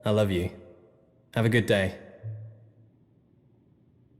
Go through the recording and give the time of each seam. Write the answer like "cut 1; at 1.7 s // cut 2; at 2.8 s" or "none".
cut 1; at 2.6 s